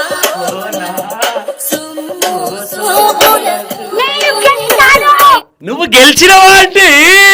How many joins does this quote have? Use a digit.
0